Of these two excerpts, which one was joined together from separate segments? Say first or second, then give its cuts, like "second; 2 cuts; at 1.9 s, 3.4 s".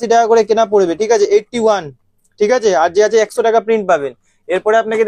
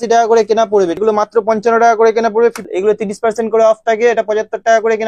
second; 2 cuts; at 1.0 s, 2.7 s